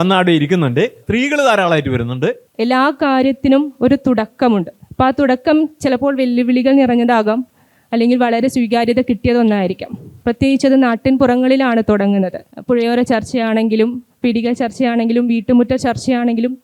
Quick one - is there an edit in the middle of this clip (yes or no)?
yes